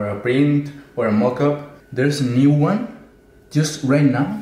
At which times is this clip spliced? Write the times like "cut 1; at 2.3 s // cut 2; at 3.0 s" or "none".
cut 1; at 1.8 s